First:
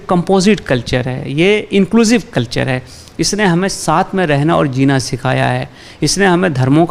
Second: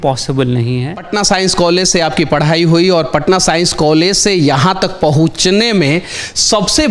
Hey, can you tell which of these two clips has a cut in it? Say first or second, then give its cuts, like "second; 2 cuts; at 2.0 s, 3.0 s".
second; 1 cut; at 1.1 s